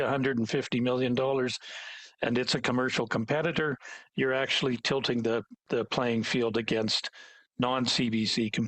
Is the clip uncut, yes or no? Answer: yes